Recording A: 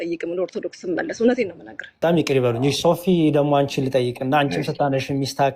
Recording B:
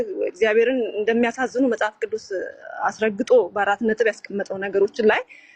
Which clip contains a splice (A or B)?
A